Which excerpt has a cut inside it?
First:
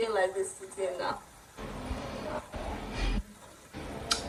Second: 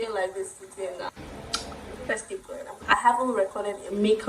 second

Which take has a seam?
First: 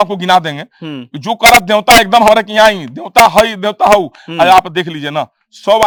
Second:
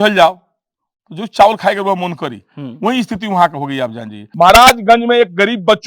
second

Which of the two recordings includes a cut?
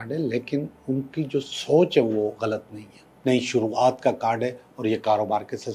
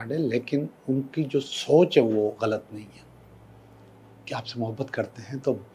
first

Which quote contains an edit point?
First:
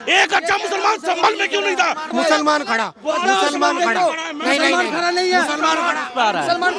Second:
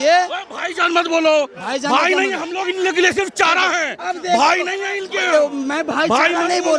first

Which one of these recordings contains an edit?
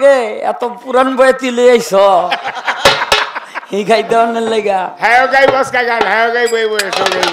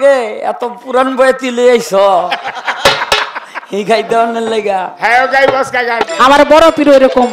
second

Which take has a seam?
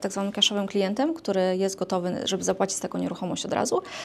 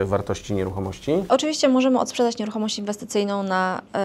second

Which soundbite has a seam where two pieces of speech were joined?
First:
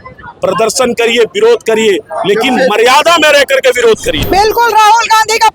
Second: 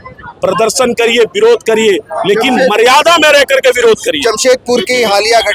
first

